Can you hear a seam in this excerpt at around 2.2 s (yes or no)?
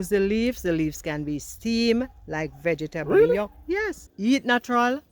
no